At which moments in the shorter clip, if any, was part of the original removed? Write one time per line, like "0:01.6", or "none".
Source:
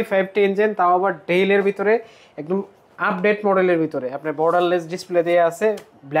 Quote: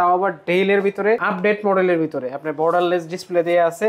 0:01.2

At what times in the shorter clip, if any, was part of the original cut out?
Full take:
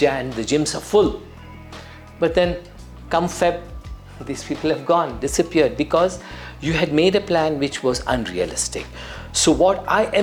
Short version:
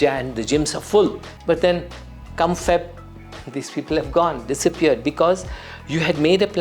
0:01.3

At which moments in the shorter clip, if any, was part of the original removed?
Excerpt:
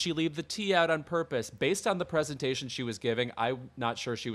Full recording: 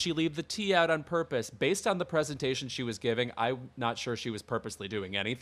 none

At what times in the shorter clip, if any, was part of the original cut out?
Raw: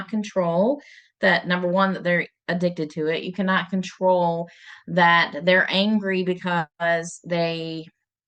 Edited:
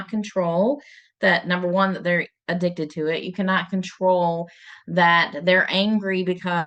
none

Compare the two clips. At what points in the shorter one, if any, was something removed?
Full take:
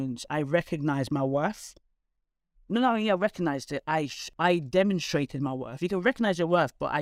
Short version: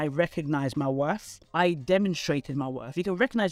0:01.4

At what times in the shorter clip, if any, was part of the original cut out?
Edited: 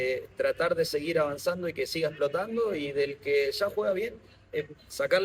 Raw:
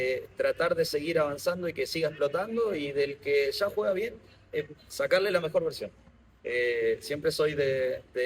none

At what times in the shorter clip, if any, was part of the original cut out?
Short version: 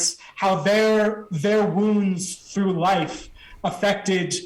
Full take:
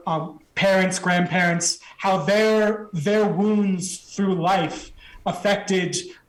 none

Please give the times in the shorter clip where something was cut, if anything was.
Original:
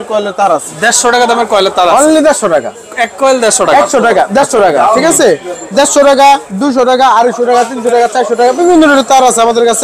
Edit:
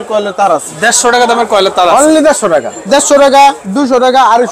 0:02.8

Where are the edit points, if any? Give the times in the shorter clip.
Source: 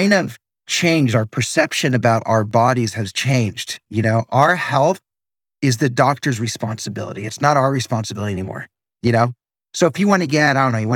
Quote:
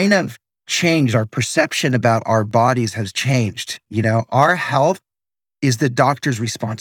none

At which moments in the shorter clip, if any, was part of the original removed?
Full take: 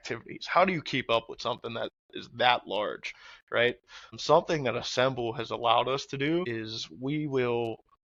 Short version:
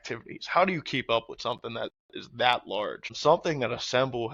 0:03.0

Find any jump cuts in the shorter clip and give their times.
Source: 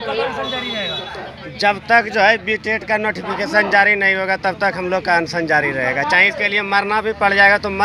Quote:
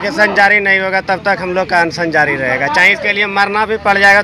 none

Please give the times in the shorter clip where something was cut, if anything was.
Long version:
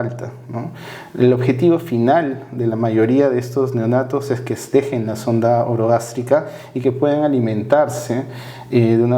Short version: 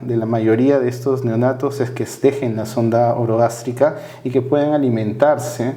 none

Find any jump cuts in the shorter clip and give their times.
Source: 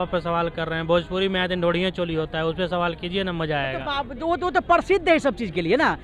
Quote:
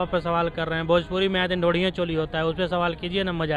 none

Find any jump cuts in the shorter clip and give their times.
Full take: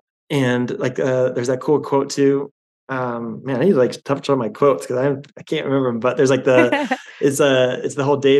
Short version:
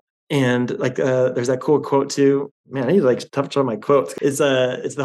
0:02.6
0:04.1

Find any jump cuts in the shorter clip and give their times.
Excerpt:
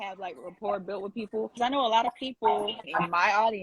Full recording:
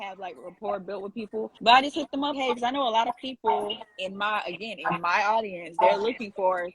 0:01.6
0:02.8

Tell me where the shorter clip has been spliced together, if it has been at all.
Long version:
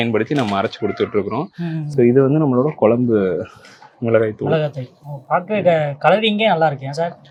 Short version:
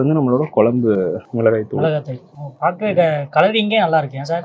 0:01.2

